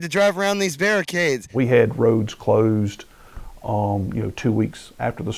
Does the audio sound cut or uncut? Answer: uncut